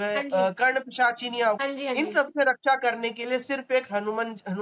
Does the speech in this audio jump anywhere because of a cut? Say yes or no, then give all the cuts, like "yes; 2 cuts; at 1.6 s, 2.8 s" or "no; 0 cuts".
yes; 1 cut; at 1.6 s